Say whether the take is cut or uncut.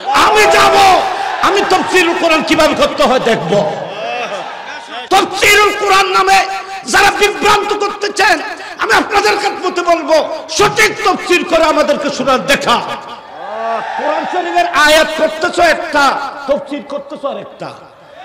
cut